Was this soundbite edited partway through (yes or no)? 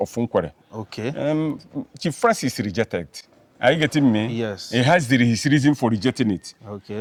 no